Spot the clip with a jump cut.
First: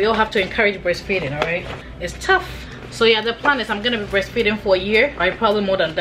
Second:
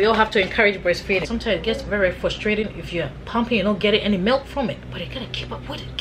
second; 2 cuts; at 1.3 s, 4.8 s

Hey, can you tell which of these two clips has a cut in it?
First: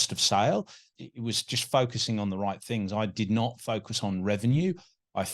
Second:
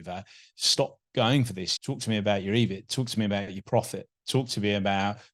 first; 1 cut; at 1.0 s

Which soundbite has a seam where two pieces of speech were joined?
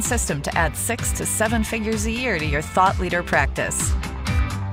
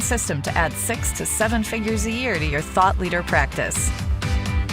second; 1 cut; at 3.7 s

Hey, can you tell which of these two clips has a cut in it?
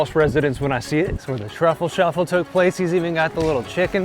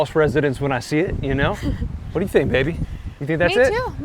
first; 1 cut; at 1.2 s

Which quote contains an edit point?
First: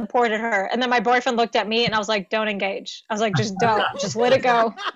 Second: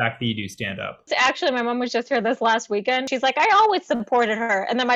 second; 2 cuts; at 1.1 s, 3.0 s

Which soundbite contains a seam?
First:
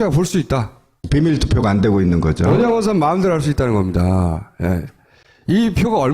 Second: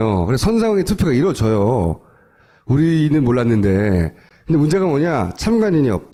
first; 1 cut; at 4.8 s

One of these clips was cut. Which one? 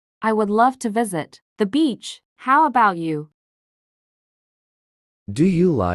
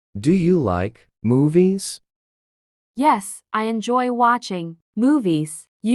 second; 1 cut; at 1.0 s

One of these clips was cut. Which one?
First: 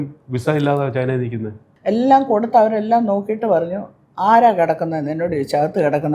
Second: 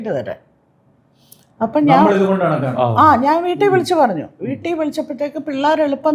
first; 1 cut; at 1.6 s

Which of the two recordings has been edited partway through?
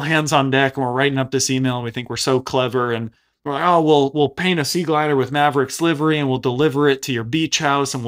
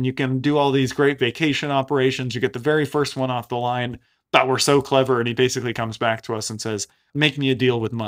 second; 1 cut; at 7.1 s

